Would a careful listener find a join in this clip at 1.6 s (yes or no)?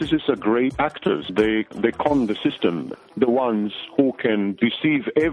yes